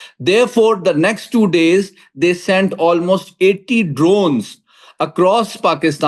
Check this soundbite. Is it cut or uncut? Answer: uncut